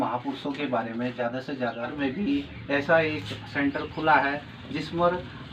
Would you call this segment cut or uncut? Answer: cut